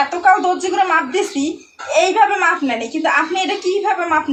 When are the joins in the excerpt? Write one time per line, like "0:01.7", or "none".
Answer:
none

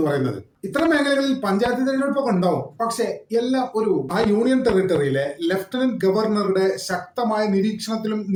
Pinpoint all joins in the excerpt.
none

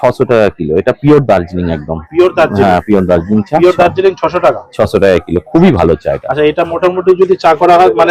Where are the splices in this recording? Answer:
none

